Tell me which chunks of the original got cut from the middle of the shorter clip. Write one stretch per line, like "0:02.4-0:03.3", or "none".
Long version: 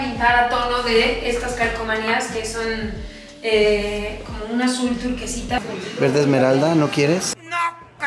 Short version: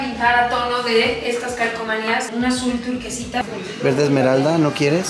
0:02.3-0:04.4